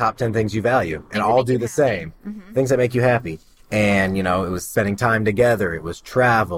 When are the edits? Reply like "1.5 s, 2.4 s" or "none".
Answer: 4.6 s